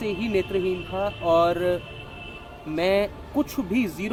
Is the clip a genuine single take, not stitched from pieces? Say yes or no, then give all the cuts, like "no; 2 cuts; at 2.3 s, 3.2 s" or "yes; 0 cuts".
yes; 0 cuts